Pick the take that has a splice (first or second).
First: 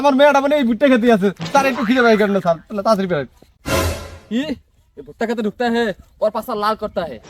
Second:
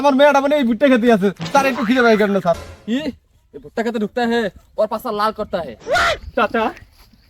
second